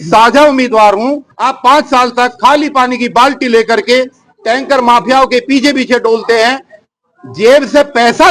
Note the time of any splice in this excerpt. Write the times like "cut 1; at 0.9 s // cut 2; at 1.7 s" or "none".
cut 1; at 1.3 s

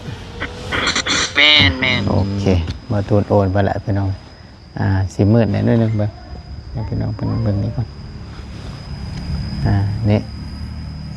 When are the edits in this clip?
cut 1; at 2.3 s

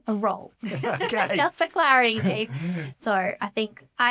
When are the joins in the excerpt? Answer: cut 1; at 2.9 s

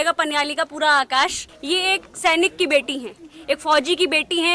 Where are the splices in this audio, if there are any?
cut 1; at 1.5 s

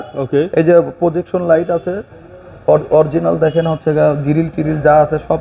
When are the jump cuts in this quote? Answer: none

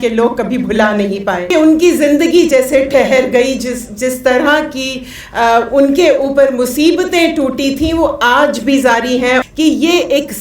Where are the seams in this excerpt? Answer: cut 1; at 1.5 s // cut 2; at 9.4 s

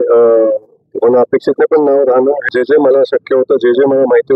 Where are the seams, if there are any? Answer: cut 1; at 2.4 s

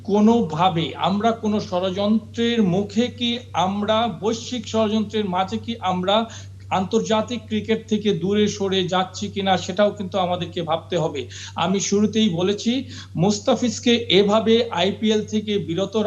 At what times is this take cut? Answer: none

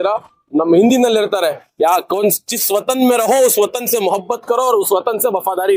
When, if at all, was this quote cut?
none

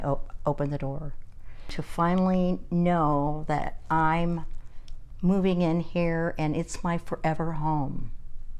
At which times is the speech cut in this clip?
cut 1; at 1.8 s

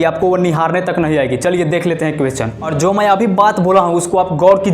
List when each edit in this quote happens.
cut 1; at 2.6 s

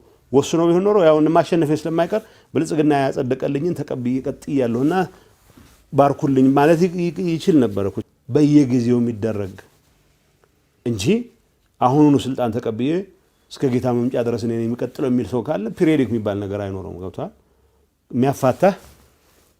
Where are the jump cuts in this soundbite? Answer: cut 1; at 8.0 s

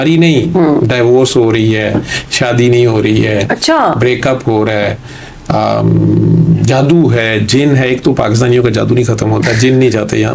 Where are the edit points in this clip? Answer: none

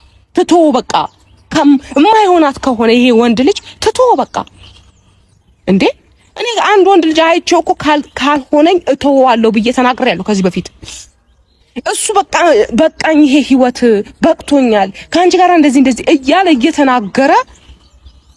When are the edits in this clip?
none

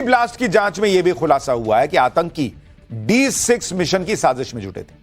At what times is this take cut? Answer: cut 1; at 1.0 s

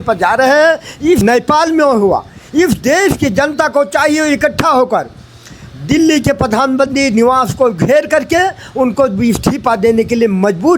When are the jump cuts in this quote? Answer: cut 1; at 1.2 s

